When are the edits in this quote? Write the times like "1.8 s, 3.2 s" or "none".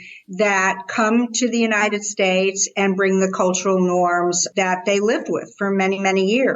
4.4 s